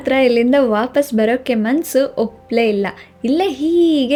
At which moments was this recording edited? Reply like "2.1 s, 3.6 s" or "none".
none